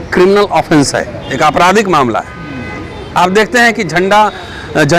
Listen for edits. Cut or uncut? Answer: uncut